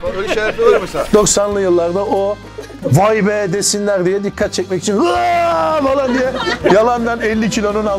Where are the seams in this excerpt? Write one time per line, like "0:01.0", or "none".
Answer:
0:01.1